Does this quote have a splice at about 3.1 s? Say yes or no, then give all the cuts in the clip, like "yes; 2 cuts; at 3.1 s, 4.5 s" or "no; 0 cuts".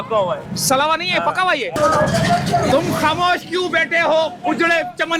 no; 1 cut; at 1.7 s